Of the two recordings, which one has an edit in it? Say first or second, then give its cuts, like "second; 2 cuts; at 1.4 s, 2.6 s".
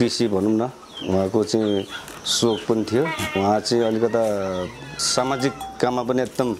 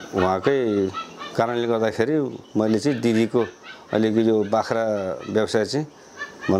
first; 3 cuts; at 0.9 s, 3.4 s, 4.9 s